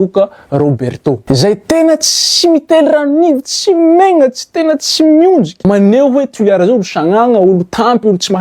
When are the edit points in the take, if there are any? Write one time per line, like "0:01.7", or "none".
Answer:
0:01.2
0:05.5